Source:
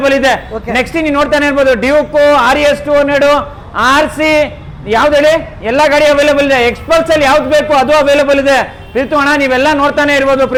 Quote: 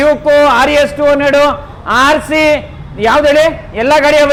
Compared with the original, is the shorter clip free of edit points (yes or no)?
yes